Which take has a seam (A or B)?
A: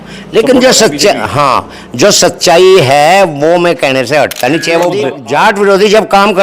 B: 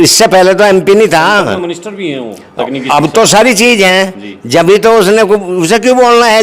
A